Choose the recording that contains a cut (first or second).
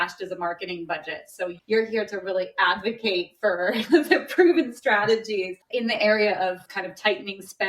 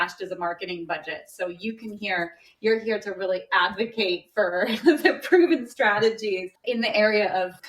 first